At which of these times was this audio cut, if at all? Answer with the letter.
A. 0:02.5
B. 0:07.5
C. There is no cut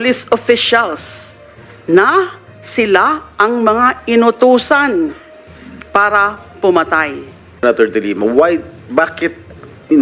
B